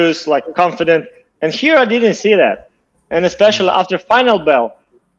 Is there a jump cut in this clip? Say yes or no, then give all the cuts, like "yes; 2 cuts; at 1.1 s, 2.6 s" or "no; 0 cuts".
no; 0 cuts